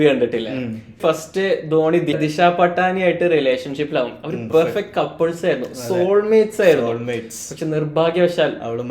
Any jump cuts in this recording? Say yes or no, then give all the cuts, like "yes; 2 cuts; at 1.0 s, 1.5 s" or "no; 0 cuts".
yes; 3 cuts; at 1.0 s, 2.2 s, 4.4 s